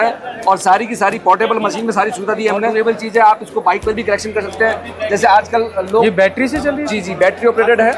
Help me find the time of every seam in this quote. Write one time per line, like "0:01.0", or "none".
0:02.7